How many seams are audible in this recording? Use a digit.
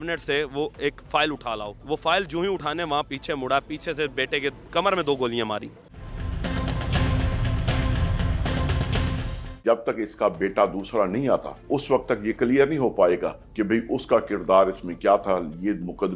5